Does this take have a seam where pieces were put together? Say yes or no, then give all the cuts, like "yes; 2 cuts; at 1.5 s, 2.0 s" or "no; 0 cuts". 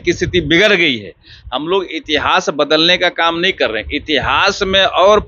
no; 0 cuts